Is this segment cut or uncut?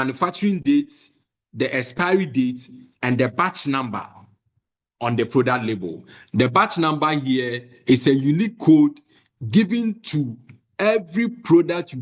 uncut